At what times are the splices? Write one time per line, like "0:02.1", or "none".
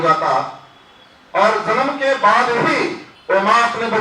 0:03.1